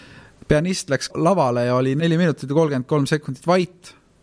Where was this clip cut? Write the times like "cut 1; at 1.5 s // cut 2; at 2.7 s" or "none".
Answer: cut 1; at 1.1 s // cut 2; at 2.0 s